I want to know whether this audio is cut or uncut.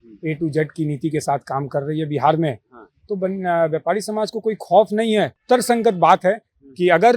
cut